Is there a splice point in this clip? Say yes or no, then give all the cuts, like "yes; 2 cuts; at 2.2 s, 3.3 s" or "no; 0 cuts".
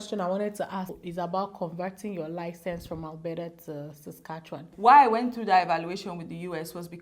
yes; 2 cuts; at 1.0 s, 4.6 s